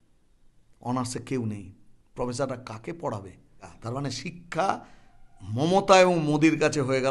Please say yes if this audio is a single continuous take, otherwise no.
no